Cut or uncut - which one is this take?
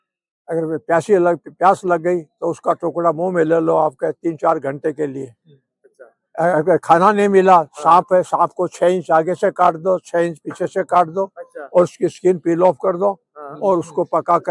uncut